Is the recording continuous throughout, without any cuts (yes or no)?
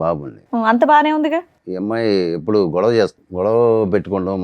no